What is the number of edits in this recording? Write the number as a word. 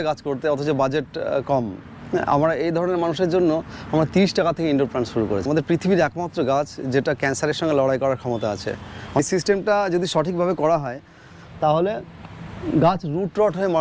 two